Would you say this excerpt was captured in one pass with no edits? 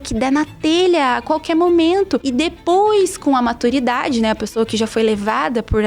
no; 1 cut; at 2.3 s

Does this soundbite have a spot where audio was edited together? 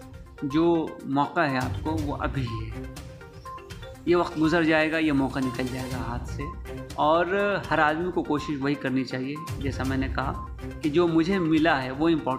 no; 0 cuts

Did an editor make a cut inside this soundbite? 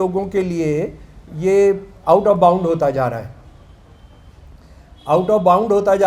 no; 0 cuts

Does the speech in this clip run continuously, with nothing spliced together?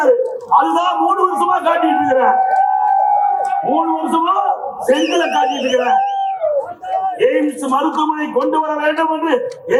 yes; 0 cuts

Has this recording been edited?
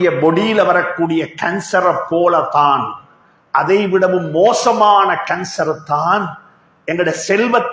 no; 0 cuts

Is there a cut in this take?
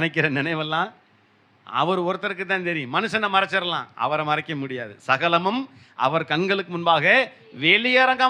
no; 0 cuts

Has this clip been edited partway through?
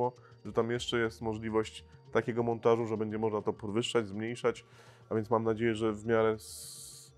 no; 0 cuts

